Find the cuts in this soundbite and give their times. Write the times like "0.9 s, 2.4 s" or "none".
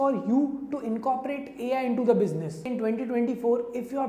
2.7 s